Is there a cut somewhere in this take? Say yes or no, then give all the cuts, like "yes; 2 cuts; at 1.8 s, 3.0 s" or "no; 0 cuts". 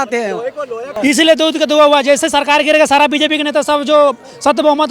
yes; 1 cut; at 0.9 s